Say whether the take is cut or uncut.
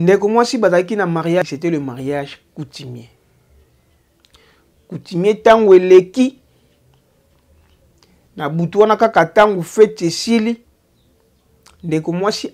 cut